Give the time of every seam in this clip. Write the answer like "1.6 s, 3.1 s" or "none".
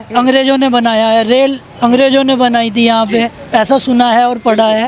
none